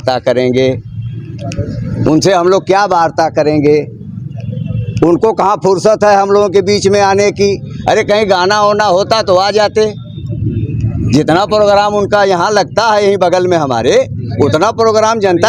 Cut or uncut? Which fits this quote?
uncut